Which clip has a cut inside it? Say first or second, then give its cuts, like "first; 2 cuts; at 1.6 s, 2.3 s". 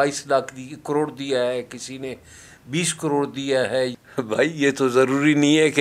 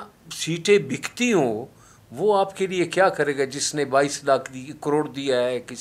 first; 1 cut; at 3.9 s